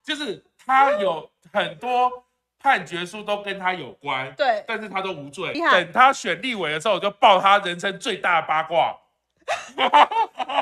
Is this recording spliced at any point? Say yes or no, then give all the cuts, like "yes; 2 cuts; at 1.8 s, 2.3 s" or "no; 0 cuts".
yes; 1 cut; at 5.6 s